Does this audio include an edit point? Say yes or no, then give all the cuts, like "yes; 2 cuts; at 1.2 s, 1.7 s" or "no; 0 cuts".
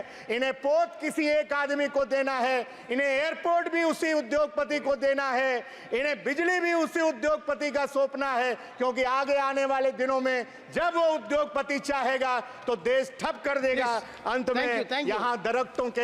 no; 0 cuts